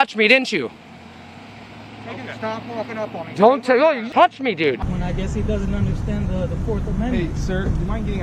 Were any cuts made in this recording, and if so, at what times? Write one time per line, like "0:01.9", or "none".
0:04.8